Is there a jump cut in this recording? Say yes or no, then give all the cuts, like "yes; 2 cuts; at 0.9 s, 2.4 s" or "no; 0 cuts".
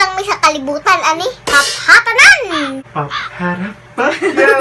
yes; 1 cut; at 2.7 s